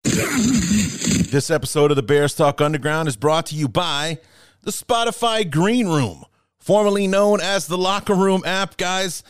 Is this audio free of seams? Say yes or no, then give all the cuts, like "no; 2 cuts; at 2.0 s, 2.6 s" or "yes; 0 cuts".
no; 1 cut; at 1.3 s